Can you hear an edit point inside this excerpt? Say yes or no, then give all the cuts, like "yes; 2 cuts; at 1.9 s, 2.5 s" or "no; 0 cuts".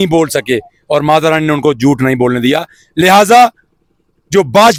no; 0 cuts